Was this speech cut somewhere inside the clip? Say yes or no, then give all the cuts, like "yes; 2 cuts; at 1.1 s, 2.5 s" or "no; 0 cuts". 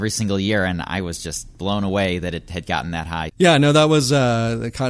yes; 1 cut; at 3.3 s